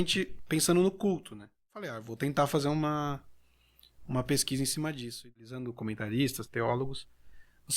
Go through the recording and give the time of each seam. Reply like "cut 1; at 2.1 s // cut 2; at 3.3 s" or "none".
cut 1; at 2.0 s // cut 2; at 5.3 s